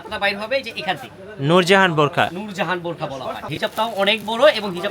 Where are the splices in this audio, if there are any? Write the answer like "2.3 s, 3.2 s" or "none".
3.4 s

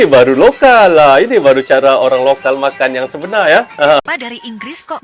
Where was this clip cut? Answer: 4.0 s

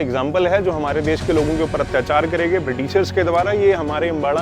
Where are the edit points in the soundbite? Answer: none

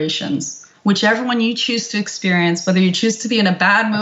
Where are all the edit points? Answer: none

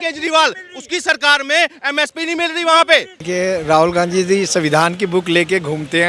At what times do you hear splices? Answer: 3.2 s

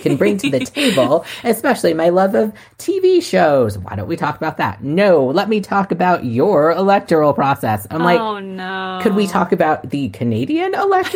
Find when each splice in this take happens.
none

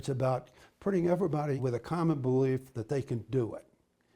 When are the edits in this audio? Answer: 1.6 s

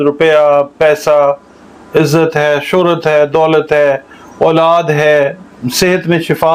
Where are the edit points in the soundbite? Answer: none

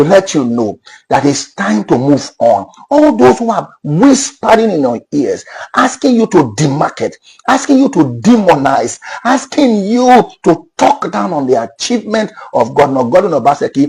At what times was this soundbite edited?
none

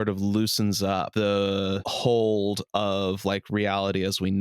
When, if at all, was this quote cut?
1.1 s, 1.9 s

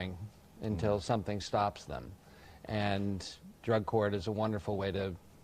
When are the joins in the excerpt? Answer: 4.1 s

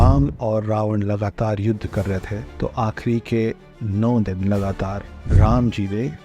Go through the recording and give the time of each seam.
2.4 s

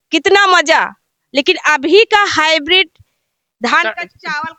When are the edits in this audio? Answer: none

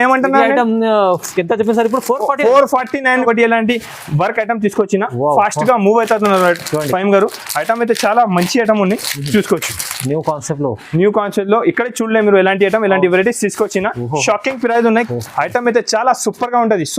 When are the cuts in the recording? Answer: 3.2 s, 15.1 s

